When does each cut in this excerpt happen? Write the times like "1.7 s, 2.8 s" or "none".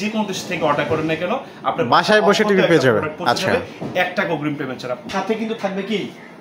5.1 s